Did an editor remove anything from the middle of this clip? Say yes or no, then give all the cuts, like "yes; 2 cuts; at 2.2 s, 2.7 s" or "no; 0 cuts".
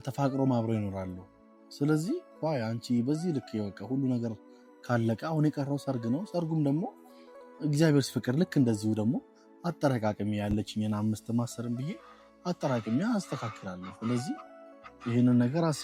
no; 0 cuts